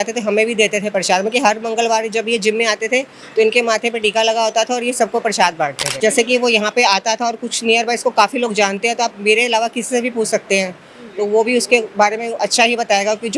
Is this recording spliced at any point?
yes; 1 cut; at 5.9 s

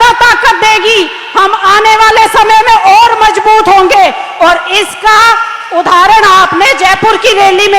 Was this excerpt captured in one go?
yes; 0 cuts

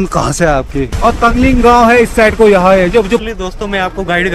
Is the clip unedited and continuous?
no; 2 cuts; at 0.9 s, 3.2 s

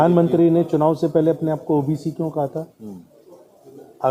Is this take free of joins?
yes; 0 cuts

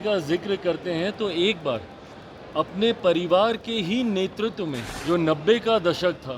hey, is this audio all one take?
no; 1 cut; at 4.9 s

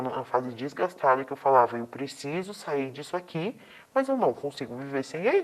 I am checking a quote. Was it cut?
no; 0 cuts

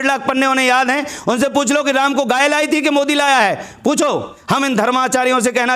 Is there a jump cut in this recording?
yes; 1 cut; at 4.4 s

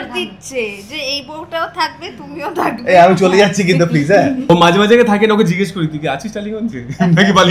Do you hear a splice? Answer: yes; 1 cut; at 4.5 s

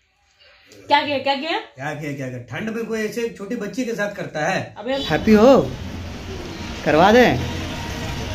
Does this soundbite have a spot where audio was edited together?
yes; 1 cut; at 4.8 s

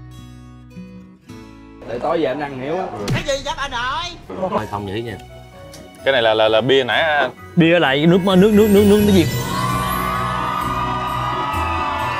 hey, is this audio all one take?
no; 1 cut; at 4.6 s

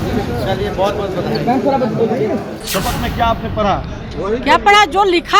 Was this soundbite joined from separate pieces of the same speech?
yes; 1 cut; at 2.6 s

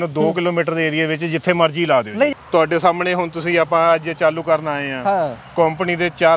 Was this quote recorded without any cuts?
no; 1 cut; at 2.3 s

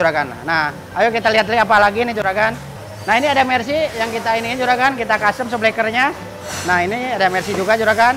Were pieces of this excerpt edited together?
no; 0 cuts

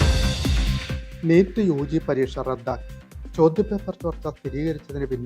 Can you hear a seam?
yes; 1 cut; at 0.9 s

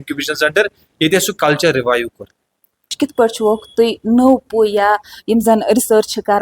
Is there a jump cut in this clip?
yes; 1 cut; at 2.9 s

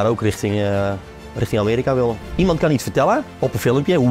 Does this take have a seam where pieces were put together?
yes; 2 cuts; at 2.2 s, 3.3 s

